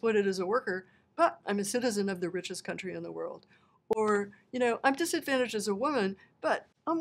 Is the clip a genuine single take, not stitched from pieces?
yes; 0 cuts

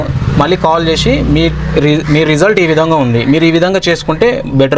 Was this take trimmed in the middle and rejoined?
no; 0 cuts

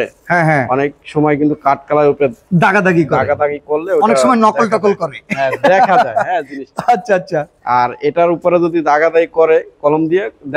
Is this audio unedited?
yes; 0 cuts

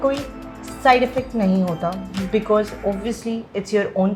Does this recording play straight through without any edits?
yes; 0 cuts

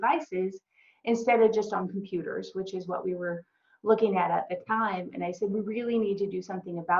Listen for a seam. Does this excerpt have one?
no; 0 cuts

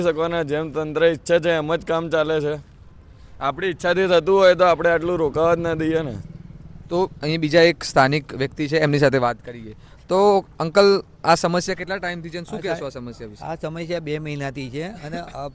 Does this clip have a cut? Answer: no; 0 cuts

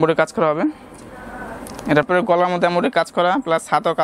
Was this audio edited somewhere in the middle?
yes; 1 cut; at 2.1 s

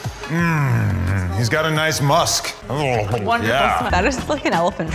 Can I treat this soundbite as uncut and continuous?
no; 1 cut; at 3.9 s

